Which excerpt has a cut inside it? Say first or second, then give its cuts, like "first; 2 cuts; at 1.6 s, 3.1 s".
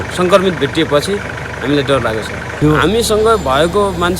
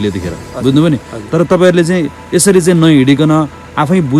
first; 1 cut; at 2.6 s